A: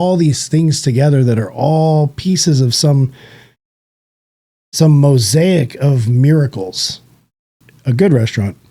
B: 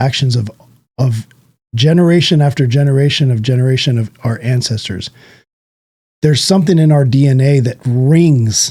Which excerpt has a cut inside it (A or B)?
A